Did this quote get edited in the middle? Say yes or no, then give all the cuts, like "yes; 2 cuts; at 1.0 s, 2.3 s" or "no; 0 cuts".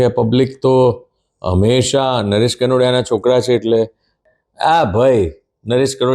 yes; 1 cut; at 4.3 s